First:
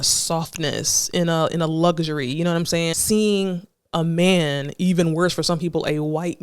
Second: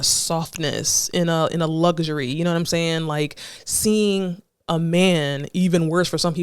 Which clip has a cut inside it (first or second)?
first